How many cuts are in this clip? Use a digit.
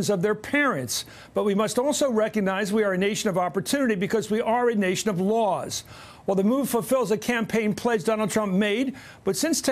1